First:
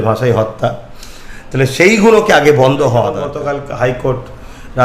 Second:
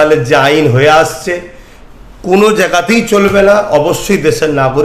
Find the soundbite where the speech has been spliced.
first; 1 cut; at 3.3 s

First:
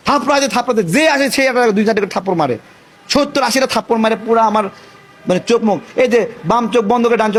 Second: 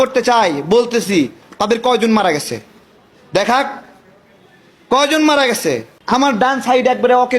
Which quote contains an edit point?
second; 1 cut; at 5.9 s

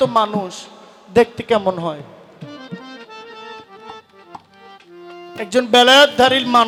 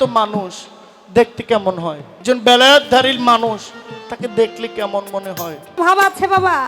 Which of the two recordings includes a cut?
second; 2 cuts; at 2.1 s, 5.8 s

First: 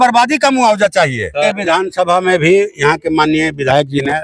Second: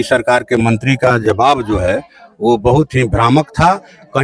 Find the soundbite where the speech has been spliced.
first; 1 cut; at 1.5 s

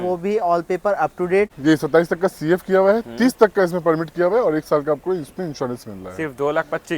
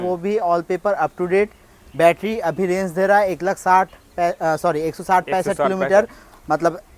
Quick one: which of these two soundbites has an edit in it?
first; 1 cut; at 1.5 s

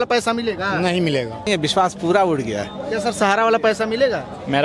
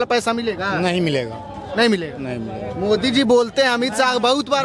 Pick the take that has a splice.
first; 1 cut; at 1.5 s

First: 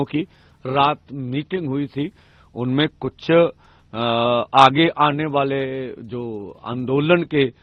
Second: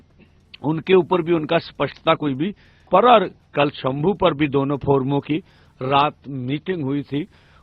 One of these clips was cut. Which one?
second; 1 cut; at 2.9 s

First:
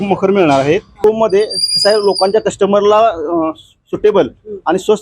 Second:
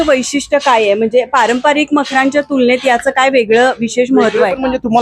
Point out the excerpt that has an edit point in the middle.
first; 1 cut; at 0.9 s

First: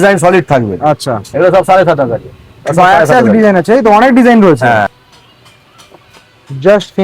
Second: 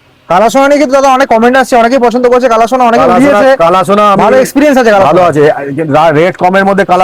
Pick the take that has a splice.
first; 2 cuts; at 1.3 s, 4.9 s

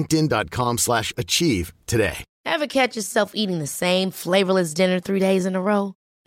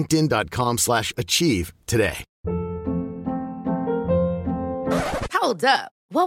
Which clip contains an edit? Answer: first; 1 cut; at 2.3 s

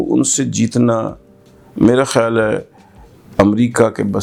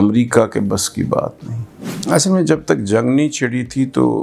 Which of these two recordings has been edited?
second; 1 cut; at 1.9 s

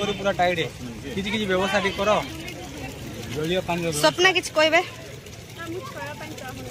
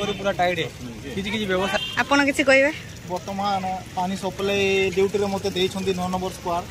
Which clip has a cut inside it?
second; 1 cut; at 1.8 s

